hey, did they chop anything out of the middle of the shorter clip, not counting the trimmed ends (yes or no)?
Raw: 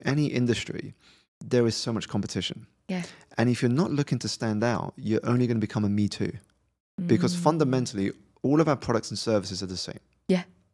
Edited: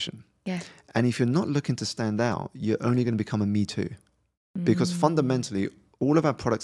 no